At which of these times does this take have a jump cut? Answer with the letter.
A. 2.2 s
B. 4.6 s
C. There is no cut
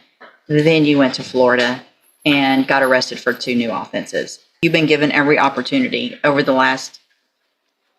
B